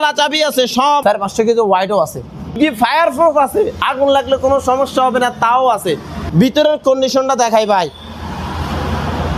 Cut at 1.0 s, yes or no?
yes